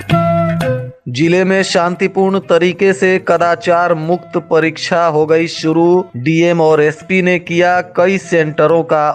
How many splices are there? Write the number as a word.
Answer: one